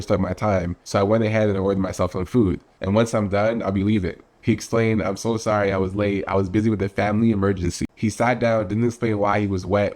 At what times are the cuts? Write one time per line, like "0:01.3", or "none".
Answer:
0:07.8